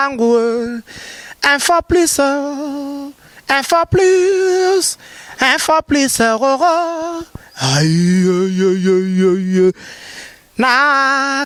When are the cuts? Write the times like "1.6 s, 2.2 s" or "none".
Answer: none